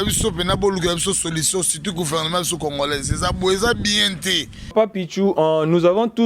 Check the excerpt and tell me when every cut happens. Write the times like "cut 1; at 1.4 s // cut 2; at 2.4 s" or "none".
cut 1; at 4.7 s